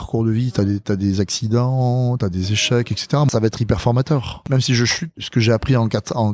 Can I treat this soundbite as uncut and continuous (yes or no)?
no